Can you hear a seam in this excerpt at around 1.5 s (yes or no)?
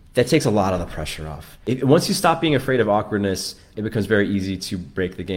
yes